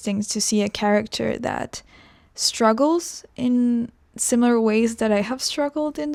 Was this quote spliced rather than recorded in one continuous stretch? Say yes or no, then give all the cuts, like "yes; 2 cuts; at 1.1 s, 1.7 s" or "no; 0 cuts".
no; 0 cuts